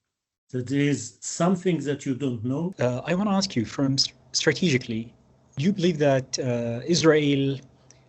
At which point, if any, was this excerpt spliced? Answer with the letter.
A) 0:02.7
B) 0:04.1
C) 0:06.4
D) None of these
A